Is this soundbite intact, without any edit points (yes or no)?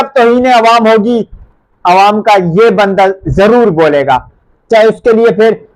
yes